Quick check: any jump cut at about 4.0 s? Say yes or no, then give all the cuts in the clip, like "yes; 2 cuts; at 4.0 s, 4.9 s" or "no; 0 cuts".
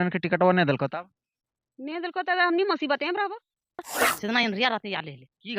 yes; 1 cut; at 4.0 s